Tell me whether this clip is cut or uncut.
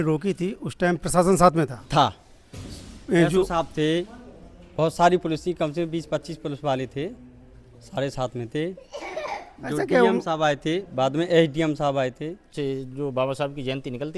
cut